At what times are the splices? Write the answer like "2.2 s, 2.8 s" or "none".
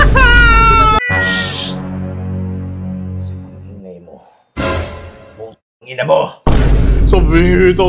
1.0 s